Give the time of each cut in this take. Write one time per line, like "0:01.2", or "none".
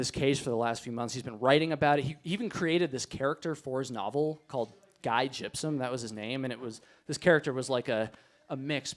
none